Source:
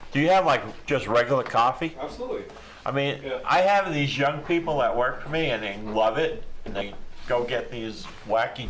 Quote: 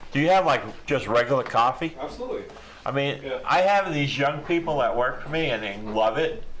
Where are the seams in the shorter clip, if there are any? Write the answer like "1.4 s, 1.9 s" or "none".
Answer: none